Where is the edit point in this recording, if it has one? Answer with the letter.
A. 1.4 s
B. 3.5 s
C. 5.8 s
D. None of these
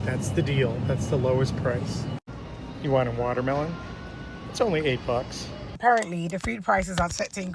C